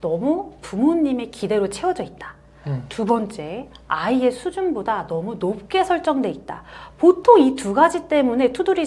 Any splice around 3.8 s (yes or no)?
no